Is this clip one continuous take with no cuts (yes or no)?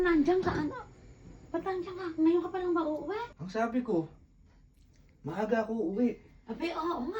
no